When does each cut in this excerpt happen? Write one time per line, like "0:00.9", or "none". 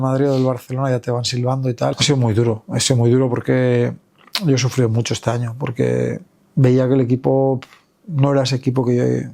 0:01.9